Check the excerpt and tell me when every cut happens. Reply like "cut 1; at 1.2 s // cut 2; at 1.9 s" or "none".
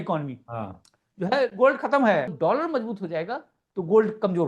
cut 1; at 2.3 s